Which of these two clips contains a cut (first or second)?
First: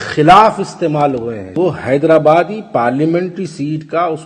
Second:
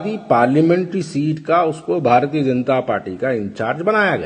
first